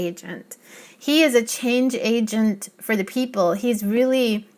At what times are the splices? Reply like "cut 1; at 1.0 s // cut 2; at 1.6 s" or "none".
none